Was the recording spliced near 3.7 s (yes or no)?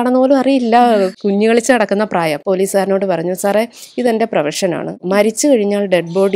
no